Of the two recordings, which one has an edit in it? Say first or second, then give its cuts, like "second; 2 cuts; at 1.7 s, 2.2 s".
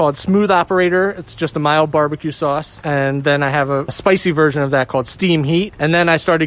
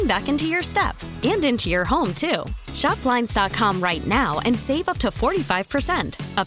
first; 1 cut; at 4.0 s